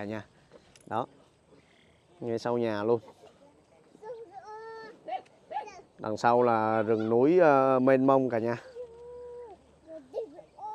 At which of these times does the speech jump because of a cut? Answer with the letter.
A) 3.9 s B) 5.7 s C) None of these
C